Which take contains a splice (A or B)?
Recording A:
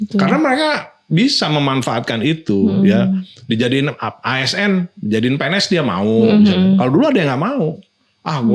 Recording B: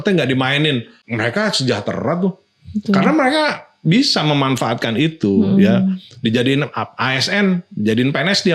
B